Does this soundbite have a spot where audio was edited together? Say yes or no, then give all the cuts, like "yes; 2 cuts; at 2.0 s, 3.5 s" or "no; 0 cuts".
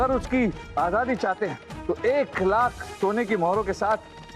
yes; 1 cut; at 1.7 s